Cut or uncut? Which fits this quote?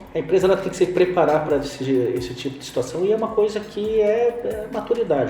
uncut